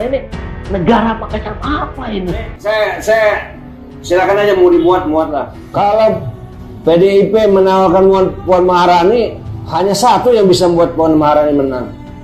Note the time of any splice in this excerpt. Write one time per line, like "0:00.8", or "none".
0:02.5
0:05.6